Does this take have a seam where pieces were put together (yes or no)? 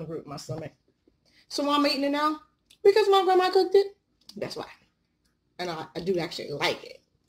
no